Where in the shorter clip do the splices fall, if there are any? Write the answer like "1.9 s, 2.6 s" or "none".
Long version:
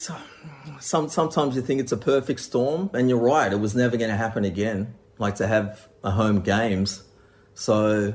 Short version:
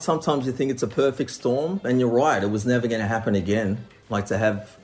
none